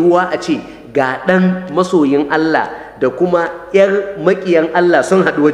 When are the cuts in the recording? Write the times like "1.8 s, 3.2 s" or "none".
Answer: none